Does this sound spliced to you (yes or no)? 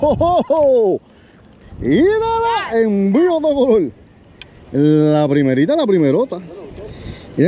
no